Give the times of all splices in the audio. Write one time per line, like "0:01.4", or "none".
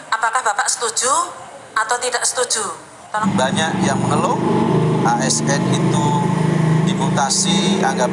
0:03.2